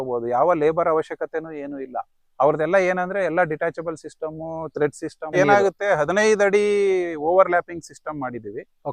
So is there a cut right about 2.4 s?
no; 1 cut; at 5.3 s

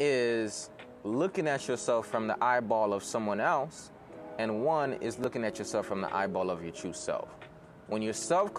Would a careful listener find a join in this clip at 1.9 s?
no; 1 cut; at 5.2 s

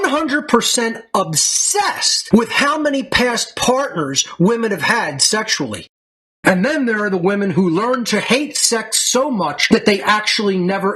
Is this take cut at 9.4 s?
no; 1 cut; at 6.2 s

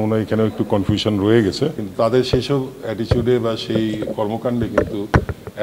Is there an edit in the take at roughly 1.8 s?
yes; 1 cut; at 1.8 s

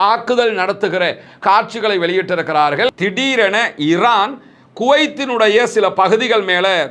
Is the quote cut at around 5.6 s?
no; 1 cut; at 3.0 s

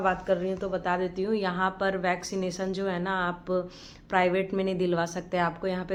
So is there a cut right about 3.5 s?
no; 0 cuts

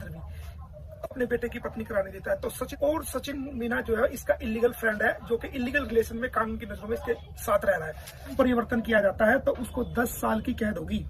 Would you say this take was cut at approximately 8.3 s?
yes; 2 cuts; at 2.7 s, 8.3 s

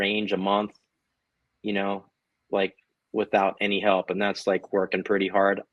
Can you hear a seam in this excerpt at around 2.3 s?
no; 0 cuts

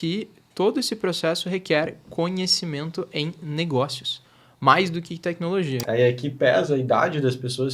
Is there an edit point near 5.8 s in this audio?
yes; 1 cut; at 5.8 s

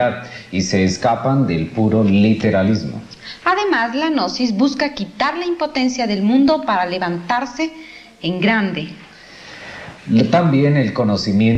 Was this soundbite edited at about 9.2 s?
yes; 1 cut; at 9.2 s

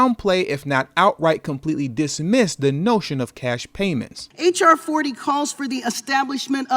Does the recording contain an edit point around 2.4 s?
no; 1 cut; at 4.2 s

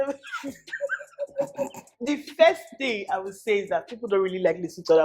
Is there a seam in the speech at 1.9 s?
yes; 1 cut; at 1.9 s

